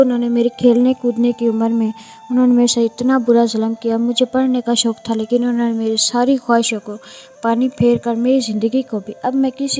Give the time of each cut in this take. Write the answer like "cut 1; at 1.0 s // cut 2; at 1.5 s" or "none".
none